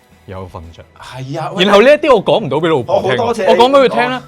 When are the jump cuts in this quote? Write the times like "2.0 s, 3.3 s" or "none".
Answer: none